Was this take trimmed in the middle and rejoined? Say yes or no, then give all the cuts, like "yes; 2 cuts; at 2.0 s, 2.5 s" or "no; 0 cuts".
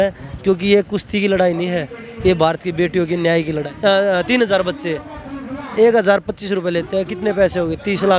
yes; 1 cut; at 3.6 s